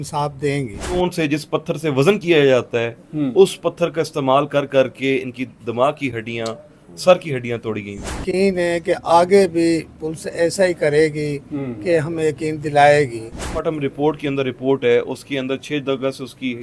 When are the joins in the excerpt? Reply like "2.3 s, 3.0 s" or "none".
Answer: 0.9 s, 8.2 s, 13.4 s